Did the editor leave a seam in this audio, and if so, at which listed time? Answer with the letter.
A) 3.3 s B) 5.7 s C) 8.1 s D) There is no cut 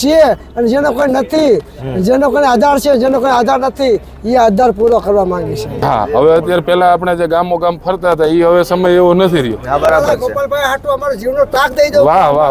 B